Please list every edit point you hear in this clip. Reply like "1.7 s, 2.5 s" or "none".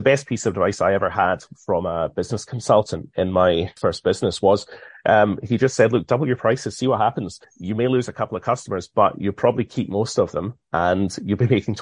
3.7 s, 7.5 s